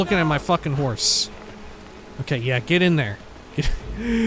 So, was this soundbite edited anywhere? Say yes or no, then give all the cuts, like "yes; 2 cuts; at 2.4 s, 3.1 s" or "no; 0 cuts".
yes; 1 cut; at 1.0 s